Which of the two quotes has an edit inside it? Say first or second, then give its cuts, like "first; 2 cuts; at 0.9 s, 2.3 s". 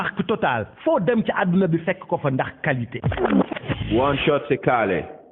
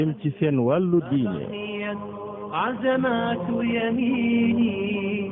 first; 1 cut; at 3.0 s